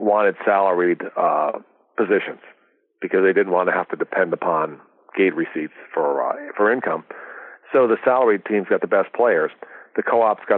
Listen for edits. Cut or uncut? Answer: uncut